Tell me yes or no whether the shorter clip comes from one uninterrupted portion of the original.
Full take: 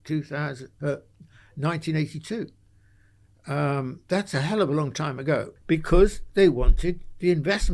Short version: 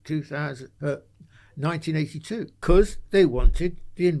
no